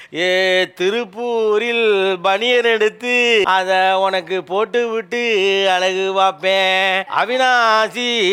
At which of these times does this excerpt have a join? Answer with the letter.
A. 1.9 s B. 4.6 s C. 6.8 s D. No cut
D